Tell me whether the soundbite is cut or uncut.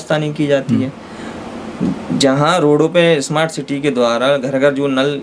uncut